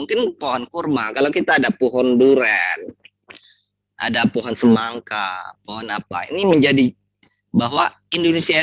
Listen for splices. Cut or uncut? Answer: uncut